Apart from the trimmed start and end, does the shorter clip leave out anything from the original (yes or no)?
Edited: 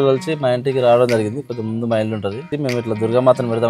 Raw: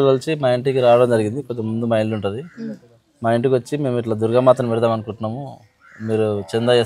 yes